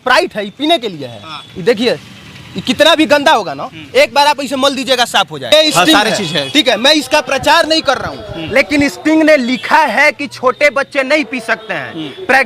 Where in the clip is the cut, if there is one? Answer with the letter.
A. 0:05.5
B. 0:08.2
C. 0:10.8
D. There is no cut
A